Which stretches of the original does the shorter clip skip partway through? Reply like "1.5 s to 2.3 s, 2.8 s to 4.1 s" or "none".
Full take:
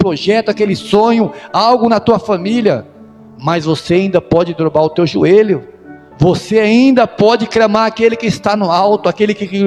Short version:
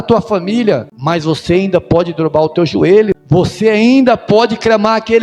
2.9 s to 3.3 s, 5.6 s to 6.1 s